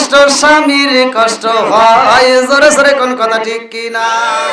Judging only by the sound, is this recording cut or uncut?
uncut